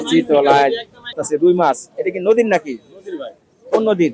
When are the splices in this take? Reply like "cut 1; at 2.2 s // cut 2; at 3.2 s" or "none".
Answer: cut 1; at 1.2 s